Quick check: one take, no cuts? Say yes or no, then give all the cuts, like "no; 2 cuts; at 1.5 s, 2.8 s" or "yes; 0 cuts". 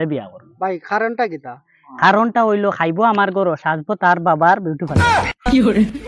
no; 1 cut; at 4.9 s